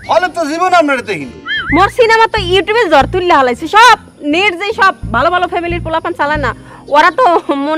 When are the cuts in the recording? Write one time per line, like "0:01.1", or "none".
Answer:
none